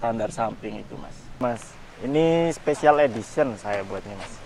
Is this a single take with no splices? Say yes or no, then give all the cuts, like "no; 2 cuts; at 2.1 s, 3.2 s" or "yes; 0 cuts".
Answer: no; 1 cut; at 1.4 s